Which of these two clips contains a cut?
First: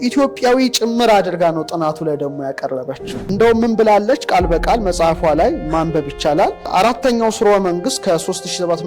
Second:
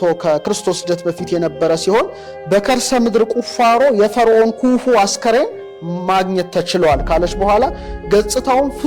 first; 1 cut; at 3.2 s

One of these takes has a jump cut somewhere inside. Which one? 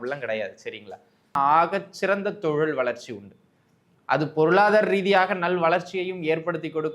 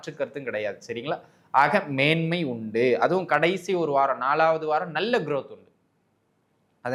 first; 1 cut; at 1.4 s

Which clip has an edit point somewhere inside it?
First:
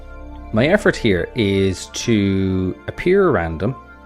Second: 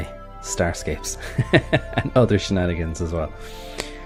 first; 1 cut; at 1.1 s

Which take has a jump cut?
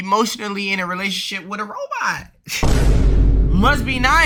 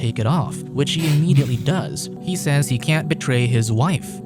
second; 1 cut; at 2.1 s

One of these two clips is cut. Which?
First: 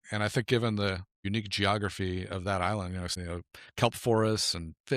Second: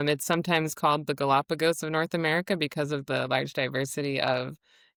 first; 2 cuts; at 1.2 s, 3.1 s

